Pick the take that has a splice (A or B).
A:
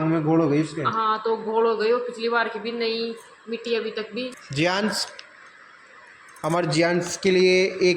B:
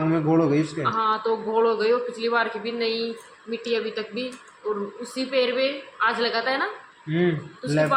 A